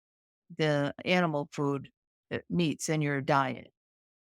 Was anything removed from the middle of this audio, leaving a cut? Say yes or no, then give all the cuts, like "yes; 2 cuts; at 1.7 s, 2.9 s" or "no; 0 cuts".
yes; 1 cut; at 1.0 s